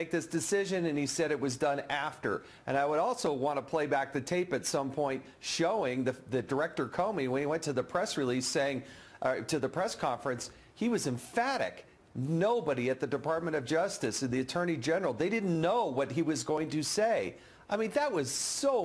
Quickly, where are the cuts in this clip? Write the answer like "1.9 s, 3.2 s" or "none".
5.3 s